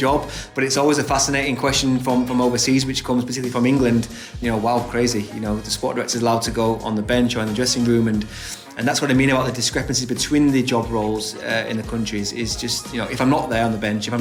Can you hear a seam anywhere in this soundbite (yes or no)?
no